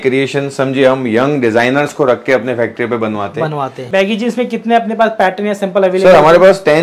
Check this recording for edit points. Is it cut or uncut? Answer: cut